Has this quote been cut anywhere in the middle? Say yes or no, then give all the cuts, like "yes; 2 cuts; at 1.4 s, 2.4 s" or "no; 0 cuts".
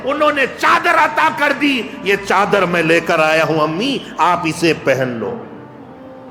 no; 0 cuts